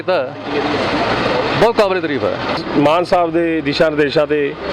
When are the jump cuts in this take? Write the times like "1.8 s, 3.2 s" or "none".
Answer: 2.6 s